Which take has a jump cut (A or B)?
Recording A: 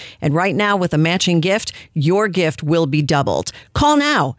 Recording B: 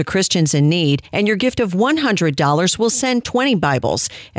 B